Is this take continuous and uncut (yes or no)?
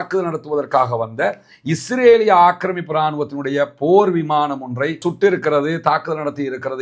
yes